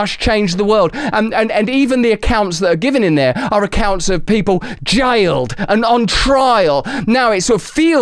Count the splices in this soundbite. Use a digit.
1